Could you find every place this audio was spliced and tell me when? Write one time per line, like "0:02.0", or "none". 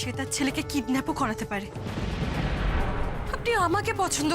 none